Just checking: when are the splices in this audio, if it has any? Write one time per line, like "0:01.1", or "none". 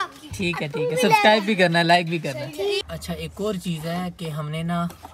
0:02.9